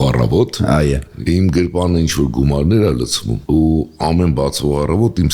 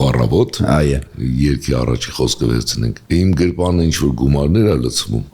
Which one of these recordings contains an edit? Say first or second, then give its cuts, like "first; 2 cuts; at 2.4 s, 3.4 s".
first; 1 cut; at 1.1 s